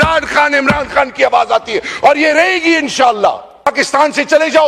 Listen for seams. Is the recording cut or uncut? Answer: cut